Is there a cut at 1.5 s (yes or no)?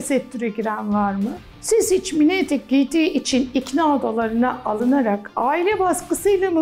yes